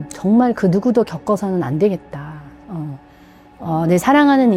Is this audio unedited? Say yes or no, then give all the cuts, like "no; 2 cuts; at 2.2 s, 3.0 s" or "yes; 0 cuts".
yes; 0 cuts